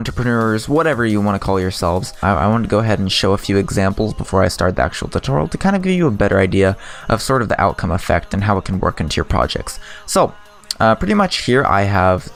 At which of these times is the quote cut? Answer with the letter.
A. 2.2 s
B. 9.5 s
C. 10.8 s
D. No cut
D